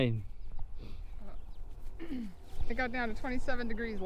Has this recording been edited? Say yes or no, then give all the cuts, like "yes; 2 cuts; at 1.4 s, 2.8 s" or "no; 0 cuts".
no; 0 cuts